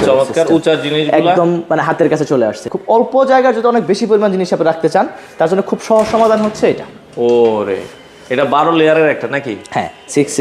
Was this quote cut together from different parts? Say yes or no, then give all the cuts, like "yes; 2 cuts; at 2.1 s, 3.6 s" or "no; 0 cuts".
yes; 1 cut; at 2.6 s